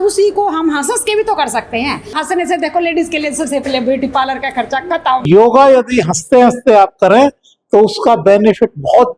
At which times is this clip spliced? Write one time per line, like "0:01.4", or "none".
0:02.2
0:05.2

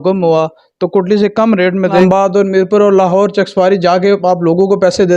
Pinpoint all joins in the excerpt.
0:02.0

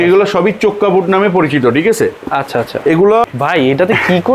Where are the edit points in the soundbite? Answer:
0:03.3

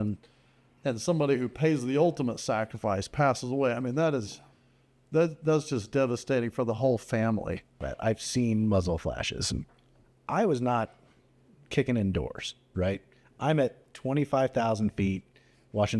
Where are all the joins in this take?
0:07.9

